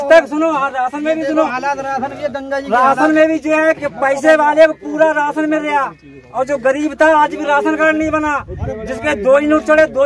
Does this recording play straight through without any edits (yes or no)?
yes